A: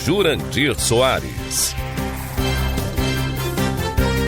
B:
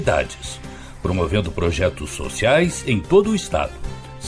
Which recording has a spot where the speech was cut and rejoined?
A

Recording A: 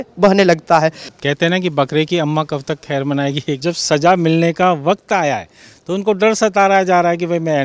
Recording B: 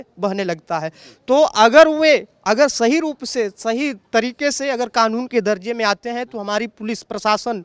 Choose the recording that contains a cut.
A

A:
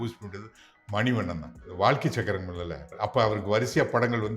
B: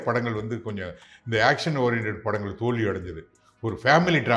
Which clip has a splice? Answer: A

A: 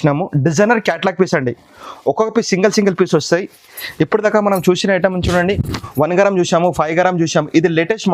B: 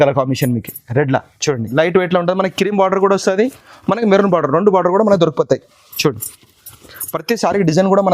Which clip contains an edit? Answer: B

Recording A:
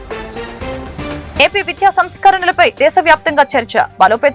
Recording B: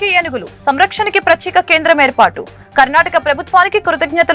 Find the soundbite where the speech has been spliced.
A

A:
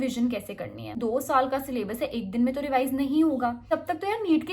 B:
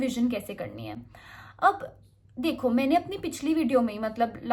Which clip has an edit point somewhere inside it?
A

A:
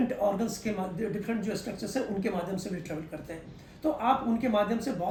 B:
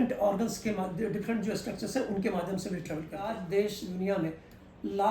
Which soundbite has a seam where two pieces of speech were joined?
B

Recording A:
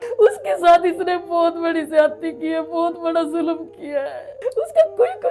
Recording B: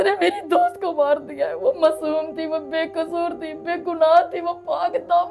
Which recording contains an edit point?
A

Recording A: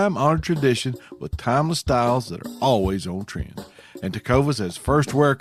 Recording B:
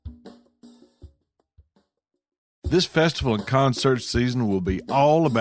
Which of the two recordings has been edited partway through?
B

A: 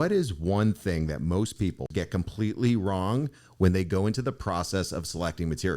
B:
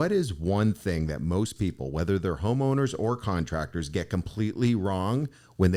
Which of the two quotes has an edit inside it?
A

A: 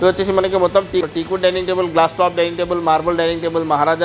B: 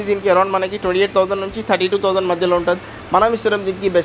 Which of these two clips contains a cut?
A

